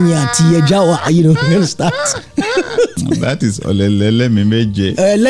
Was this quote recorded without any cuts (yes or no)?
no